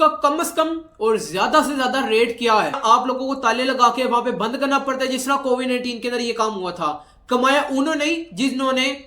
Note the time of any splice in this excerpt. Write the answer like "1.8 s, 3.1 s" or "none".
2.8 s